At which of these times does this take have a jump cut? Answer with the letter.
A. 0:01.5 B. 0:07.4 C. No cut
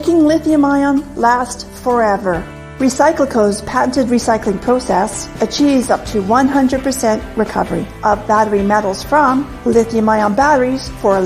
A